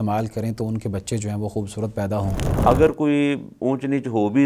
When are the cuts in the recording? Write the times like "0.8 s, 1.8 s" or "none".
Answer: 2.4 s